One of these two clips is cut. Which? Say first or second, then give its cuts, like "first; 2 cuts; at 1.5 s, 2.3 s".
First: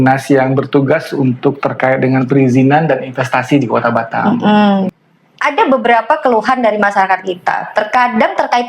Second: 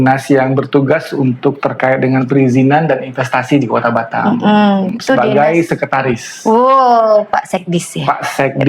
first; 1 cut; at 4.9 s